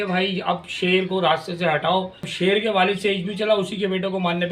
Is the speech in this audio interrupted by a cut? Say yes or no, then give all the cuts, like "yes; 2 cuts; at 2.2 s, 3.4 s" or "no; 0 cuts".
yes; 1 cut; at 2.3 s